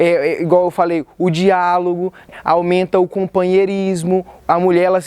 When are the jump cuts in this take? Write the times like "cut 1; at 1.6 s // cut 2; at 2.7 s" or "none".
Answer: cut 1; at 2.3 s